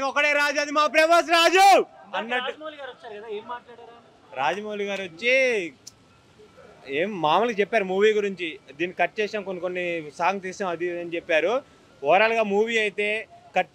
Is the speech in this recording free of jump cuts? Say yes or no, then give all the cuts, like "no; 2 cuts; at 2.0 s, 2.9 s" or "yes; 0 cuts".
yes; 0 cuts